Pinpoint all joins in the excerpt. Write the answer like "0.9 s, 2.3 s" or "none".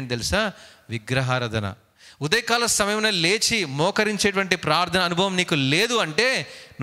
1.9 s